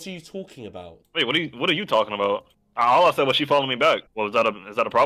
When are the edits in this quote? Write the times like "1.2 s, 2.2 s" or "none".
1.0 s, 2.6 s, 4.1 s